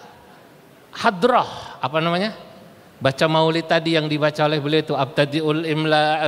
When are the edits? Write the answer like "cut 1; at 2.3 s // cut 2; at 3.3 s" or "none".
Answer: none